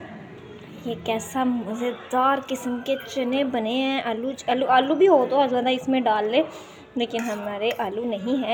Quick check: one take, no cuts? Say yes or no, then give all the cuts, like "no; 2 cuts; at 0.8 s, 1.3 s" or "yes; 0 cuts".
yes; 0 cuts